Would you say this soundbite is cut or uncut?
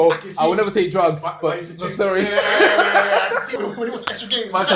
cut